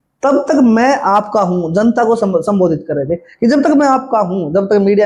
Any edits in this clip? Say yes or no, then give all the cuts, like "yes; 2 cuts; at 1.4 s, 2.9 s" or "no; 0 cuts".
no; 0 cuts